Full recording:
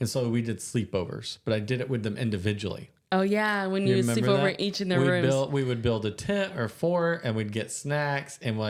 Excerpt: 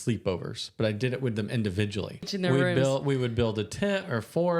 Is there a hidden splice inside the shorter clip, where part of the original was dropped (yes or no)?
yes